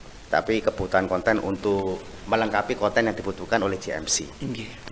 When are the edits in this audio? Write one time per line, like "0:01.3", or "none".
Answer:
none